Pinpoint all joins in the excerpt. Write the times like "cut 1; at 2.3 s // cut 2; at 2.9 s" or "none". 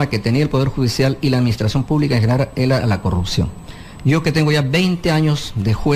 cut 1; at 1.9 s